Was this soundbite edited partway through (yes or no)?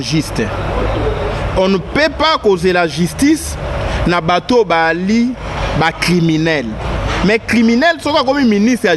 yes